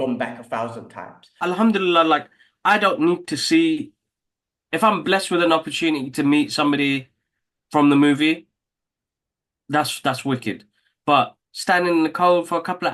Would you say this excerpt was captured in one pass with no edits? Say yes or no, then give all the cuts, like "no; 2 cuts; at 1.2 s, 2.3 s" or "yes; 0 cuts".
no; 1 cut; at 1.4 s